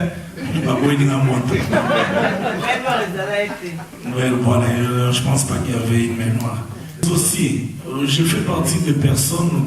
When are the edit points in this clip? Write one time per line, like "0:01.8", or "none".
0:06.9